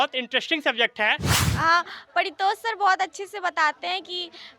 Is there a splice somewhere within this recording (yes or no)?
yes